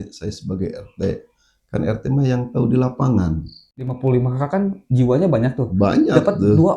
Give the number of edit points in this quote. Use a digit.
1